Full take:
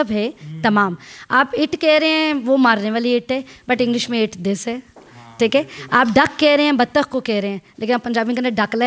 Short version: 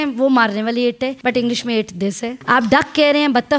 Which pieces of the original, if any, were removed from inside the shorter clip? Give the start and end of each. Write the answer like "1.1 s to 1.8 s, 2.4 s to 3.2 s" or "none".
3.4 s to 3.6 s, 4.8 s to 5.8 s